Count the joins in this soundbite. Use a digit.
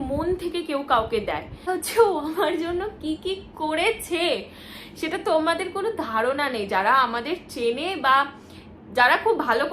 1